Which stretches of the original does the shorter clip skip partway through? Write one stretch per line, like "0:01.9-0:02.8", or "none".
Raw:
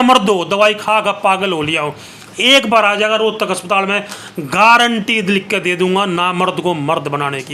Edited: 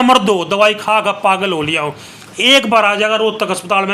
none

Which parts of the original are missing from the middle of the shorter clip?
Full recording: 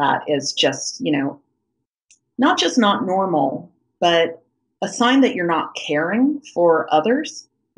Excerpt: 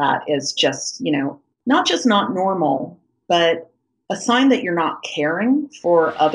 0:01.5-0:02.2

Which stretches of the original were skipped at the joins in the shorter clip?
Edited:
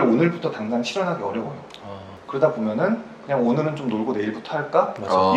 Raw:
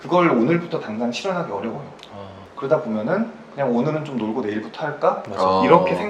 none

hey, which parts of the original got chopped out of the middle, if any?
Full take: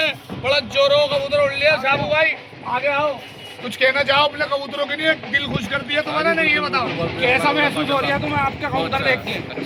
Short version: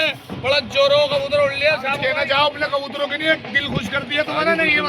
0:01.9-0:03.7

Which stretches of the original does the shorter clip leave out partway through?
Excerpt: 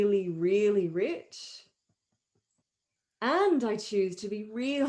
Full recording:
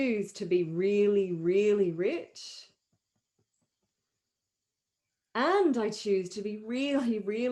0:03.7-0:04.8

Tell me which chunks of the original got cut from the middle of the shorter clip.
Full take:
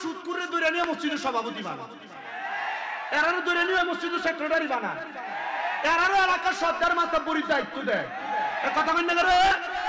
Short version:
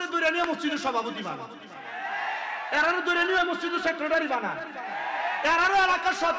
none

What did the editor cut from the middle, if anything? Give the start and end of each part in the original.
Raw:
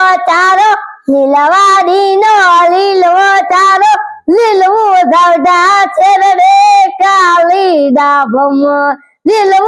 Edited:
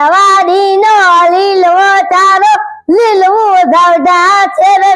none

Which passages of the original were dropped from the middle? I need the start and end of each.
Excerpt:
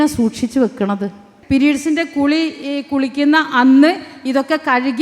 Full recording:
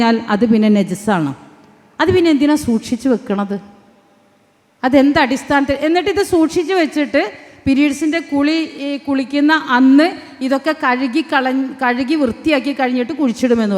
0:03.8-0:07.4

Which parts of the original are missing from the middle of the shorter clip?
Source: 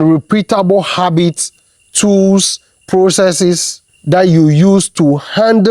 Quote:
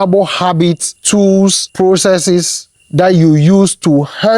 0:01.9-0:02.5

